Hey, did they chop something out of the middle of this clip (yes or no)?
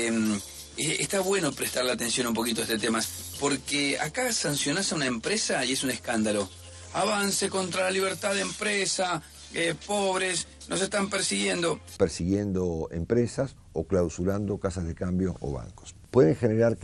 no